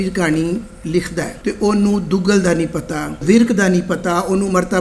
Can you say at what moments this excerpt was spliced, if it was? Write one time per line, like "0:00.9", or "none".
0:01.3
0:03.2